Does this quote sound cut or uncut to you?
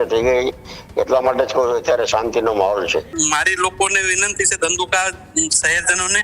cut